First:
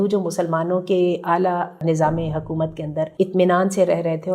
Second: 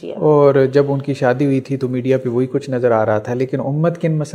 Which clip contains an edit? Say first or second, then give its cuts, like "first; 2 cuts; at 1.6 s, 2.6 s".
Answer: first; 2 cuts; at 1.8 s, 3.1 s